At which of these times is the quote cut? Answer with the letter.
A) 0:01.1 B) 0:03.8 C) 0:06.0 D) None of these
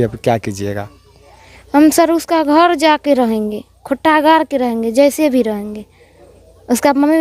D